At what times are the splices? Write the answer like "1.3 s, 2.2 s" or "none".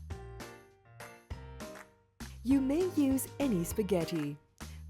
1.6 s, 2.3 s